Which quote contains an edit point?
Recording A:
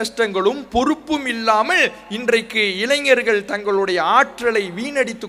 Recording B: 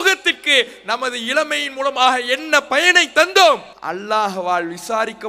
B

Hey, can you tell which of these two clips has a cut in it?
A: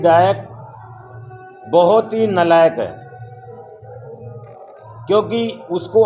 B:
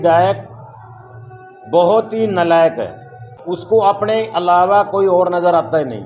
B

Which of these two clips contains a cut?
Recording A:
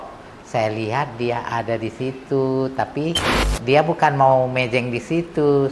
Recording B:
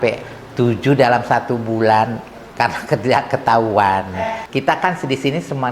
B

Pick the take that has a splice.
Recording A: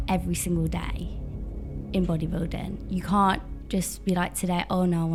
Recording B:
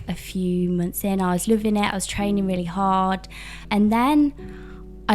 B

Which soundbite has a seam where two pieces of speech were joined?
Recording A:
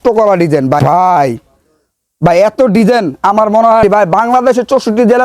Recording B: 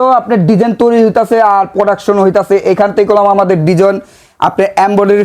A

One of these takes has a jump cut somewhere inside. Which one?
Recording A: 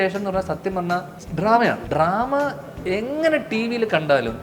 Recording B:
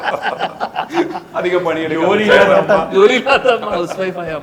A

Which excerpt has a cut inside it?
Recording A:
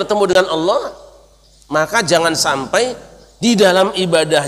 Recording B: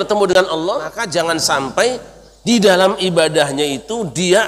B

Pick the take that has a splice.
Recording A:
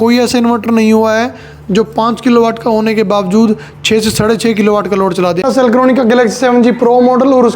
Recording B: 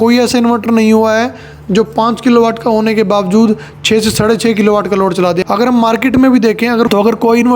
A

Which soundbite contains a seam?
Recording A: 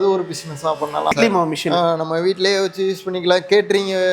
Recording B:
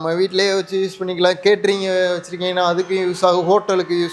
A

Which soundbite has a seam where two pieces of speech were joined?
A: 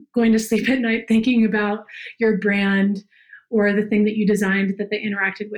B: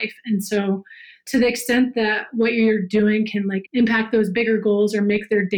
B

